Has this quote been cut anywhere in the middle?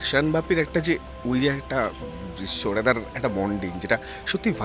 no; 0 cuts

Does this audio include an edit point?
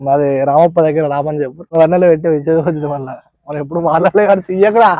yes; 1 cut; at 1.7 s

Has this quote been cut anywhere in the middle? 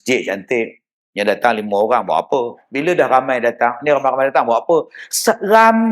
yes; 1 cut; at 2.6 s

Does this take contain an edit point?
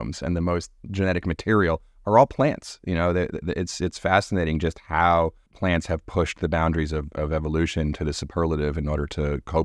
no; 0 cuts

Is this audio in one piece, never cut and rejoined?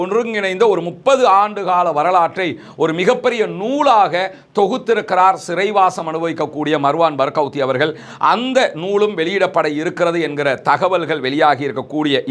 yes; 0 cuts

